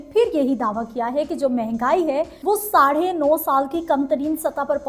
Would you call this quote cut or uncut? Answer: cut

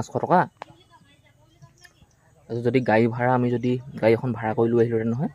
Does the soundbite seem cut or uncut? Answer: uncut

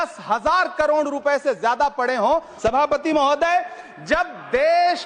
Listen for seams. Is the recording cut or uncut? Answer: cut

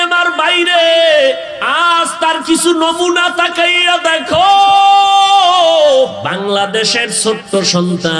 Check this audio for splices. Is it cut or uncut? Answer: cut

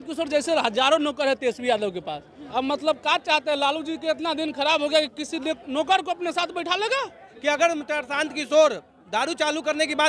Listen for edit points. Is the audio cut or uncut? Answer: cut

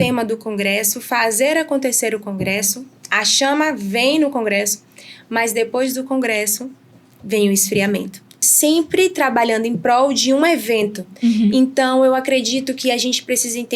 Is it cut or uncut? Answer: cut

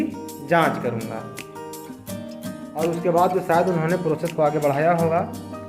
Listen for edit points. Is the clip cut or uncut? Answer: cut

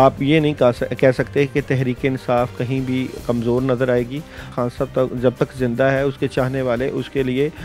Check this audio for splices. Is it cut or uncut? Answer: cut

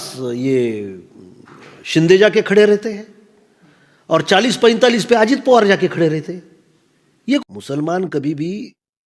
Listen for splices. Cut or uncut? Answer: cut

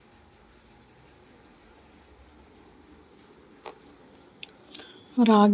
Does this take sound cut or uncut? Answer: uncut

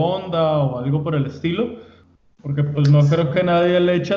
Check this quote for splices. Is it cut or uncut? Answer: cut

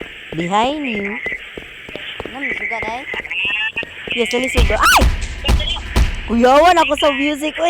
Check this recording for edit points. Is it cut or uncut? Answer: uncut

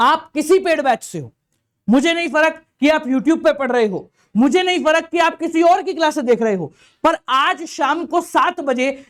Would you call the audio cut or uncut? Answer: uncut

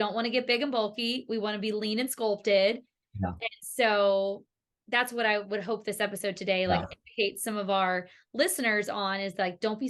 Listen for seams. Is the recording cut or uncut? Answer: uncut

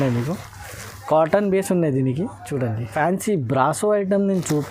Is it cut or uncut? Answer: cut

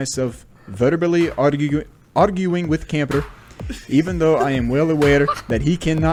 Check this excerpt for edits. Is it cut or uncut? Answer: uncut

